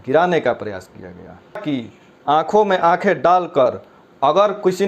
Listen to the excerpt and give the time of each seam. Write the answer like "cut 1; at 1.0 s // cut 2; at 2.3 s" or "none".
cut 1; at 1.6 s